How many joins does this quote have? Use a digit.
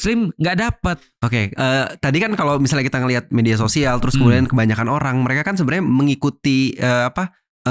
1